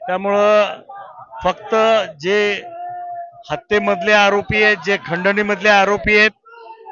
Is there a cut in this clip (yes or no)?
no